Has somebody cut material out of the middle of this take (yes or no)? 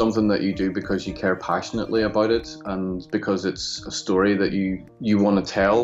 yes